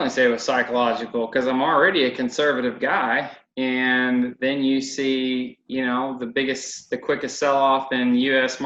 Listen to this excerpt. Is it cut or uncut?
uncut